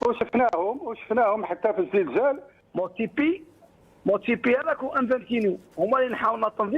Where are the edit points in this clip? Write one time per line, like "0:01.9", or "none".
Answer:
0:02.5